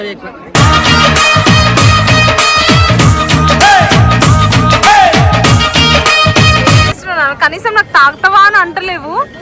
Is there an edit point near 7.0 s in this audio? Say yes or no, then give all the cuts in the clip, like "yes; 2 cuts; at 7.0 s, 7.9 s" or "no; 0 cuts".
yes; 1 cut; at 7.0 s